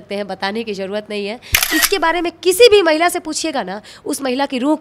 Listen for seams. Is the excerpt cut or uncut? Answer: cut